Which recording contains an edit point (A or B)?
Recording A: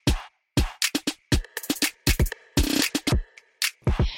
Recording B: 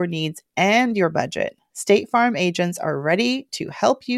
A